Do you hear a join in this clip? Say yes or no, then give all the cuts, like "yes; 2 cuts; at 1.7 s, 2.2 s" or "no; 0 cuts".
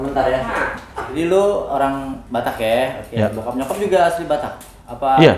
yes; 1 cut; at 1.1 s